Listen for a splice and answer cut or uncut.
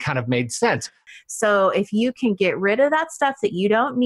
cut